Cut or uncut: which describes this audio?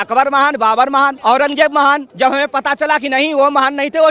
cut